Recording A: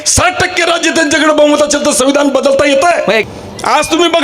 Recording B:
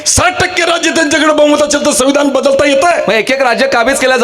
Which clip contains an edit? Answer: A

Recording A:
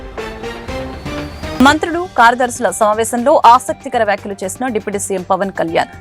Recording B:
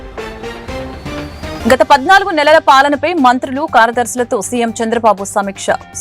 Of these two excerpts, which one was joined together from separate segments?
B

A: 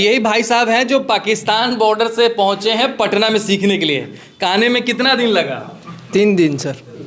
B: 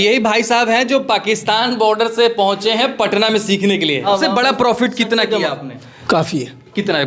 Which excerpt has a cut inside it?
B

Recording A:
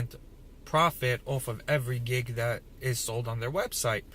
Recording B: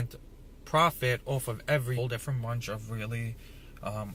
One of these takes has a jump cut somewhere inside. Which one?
A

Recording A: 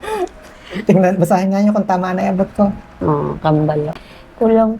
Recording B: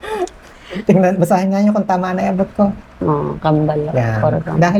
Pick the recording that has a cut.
A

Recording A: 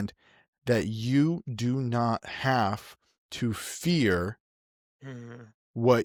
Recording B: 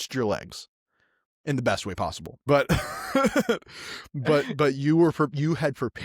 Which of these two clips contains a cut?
B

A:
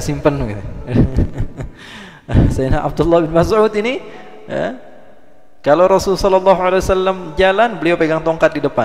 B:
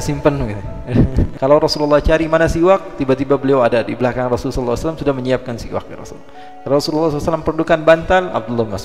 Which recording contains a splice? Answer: B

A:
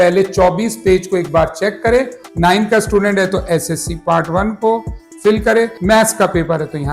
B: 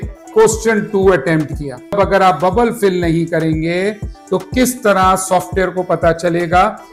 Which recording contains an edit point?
A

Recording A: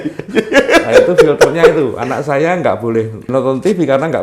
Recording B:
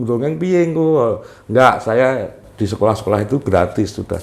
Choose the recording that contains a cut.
A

